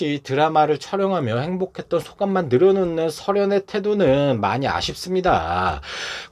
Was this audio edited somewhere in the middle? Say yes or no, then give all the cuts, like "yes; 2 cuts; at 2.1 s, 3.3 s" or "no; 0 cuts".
no; 0 cuts